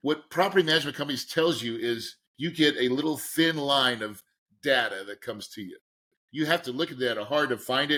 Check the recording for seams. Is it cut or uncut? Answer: uncut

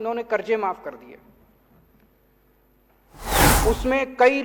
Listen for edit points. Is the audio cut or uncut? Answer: uncut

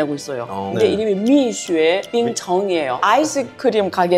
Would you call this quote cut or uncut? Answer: cut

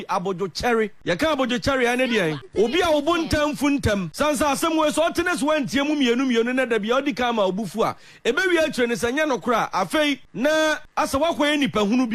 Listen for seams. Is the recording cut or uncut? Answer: cut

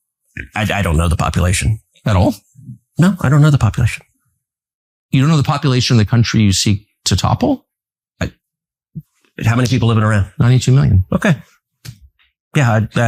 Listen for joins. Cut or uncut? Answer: uncut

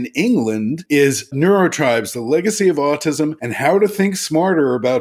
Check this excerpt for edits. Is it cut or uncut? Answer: cut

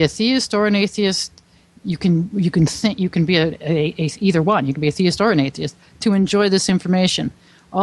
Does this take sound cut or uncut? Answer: uncut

